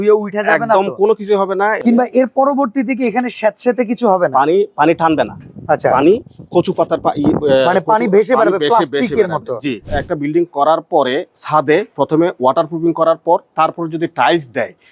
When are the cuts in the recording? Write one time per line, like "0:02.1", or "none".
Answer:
0:01.8
0:10.0